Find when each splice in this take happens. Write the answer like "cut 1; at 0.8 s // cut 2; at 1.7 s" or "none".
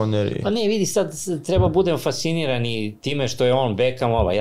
none